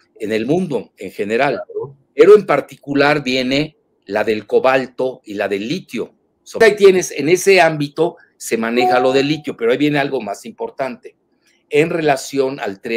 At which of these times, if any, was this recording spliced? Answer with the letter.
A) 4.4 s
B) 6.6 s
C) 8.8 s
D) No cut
B